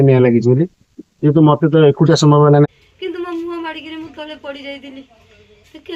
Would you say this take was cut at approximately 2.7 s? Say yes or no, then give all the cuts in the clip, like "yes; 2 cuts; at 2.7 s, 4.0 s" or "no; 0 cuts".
yes; 1 cut; at 2.7 s